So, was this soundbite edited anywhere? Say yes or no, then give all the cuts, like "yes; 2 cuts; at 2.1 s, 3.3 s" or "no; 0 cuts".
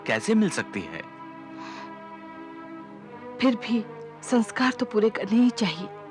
no; 0 cuts